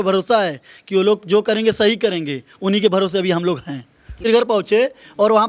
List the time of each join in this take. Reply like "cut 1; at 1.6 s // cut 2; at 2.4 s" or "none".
cut 1; at 4.2 s